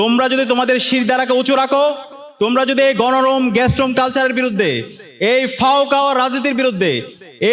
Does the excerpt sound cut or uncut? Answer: uncut